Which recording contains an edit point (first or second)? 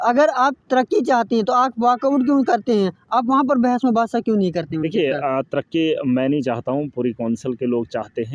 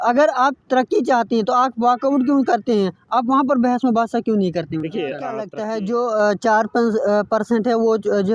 second